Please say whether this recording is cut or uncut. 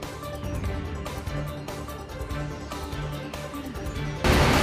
cut